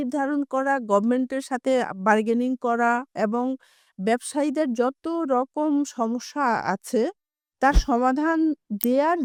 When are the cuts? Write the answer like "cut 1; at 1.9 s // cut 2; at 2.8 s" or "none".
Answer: none